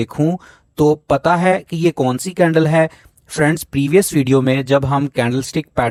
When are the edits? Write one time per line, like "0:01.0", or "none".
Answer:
none

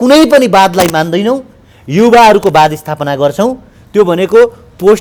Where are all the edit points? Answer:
none

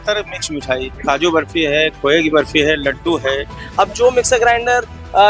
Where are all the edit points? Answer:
0:00.9
0:03.6

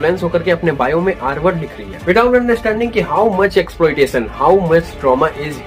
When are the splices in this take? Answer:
none

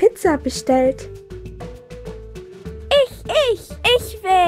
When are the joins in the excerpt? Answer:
none

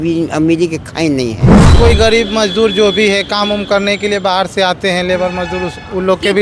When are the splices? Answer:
0:01.6

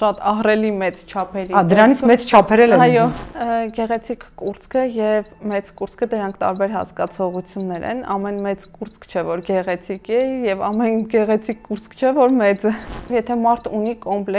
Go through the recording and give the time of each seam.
0:03.2
0:13.1

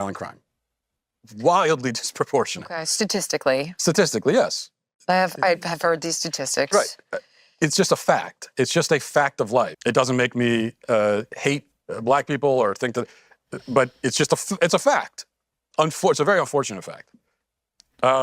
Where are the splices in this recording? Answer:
0:09.7

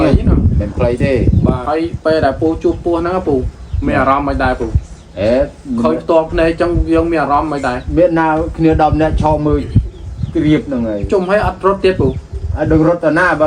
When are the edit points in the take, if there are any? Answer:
0:01.6

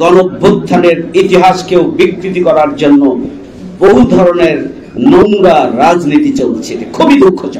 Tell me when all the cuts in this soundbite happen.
none

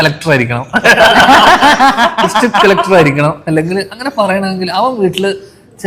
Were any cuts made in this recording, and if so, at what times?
none

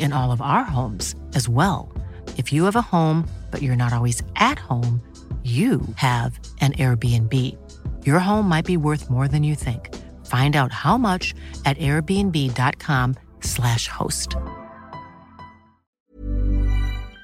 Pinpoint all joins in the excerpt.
0:15.9

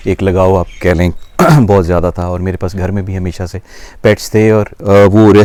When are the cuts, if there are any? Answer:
none

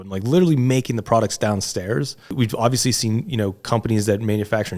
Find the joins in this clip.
0:02.3

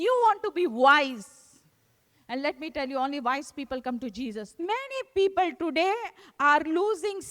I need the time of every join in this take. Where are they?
0:04.5

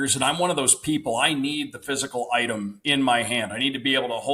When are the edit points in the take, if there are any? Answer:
0:02.8

